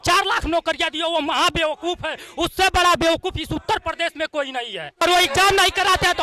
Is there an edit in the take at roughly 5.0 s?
yes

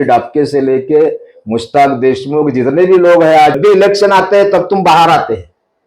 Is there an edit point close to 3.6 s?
yes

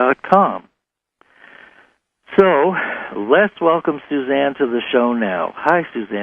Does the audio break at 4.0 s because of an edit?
no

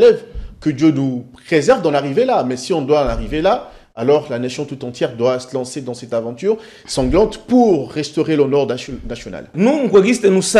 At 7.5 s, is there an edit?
no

